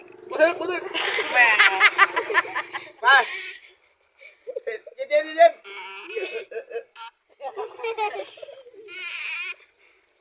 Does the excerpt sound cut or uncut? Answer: uncut